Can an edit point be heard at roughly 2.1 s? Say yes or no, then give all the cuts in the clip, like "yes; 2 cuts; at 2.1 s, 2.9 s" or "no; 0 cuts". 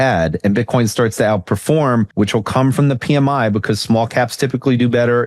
yes; 1 cut; at 2.1 s